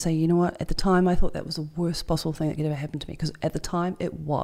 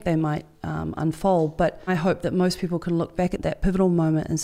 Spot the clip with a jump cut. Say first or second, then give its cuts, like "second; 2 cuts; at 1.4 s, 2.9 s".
second; 2 cuts; at 1.9 s, 3.4 s